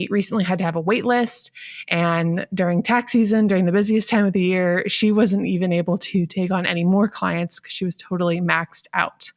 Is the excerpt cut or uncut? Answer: uncut